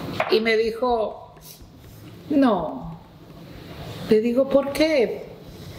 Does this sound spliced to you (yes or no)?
no